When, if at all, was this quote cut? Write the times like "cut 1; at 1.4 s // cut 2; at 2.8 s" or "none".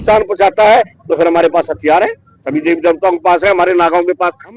none